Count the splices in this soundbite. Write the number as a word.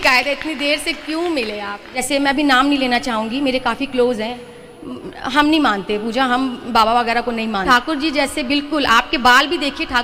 two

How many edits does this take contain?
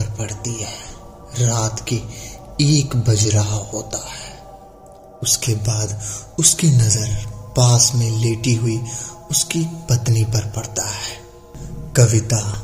one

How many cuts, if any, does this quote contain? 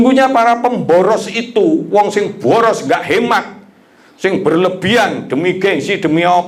zero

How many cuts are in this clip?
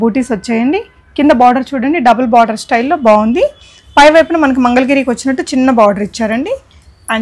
zero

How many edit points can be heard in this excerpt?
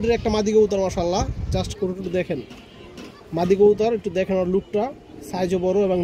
zero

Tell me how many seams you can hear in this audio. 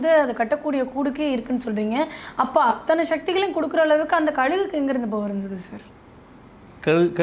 zero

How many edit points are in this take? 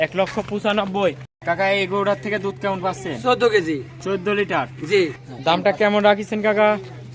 two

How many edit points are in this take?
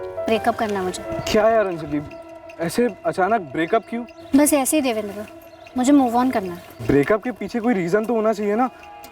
one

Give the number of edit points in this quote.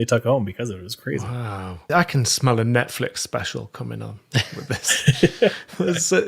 one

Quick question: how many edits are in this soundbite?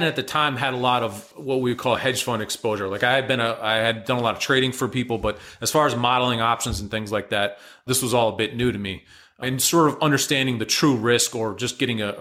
one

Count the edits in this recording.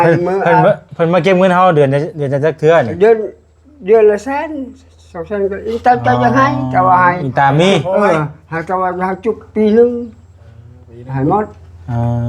zero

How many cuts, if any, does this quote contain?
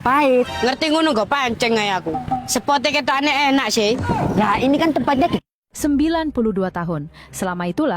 one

